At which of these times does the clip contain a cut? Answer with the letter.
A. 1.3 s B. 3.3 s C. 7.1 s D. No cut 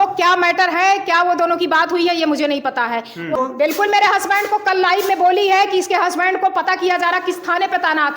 B